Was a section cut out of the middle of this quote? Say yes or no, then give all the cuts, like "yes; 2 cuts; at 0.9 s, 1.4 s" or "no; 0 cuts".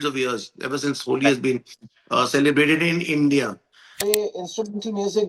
yes; 1 cut; at 3.9 s